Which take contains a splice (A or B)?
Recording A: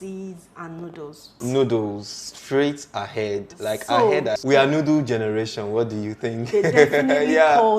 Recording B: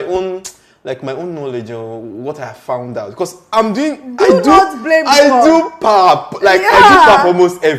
A